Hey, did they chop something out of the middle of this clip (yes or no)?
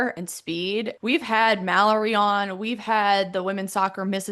yes